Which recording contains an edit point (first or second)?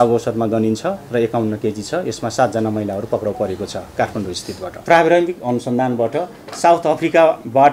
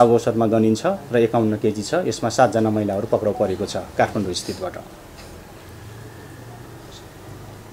first